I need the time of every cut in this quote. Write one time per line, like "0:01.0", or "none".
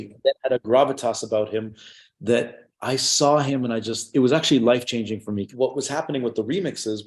0:05.5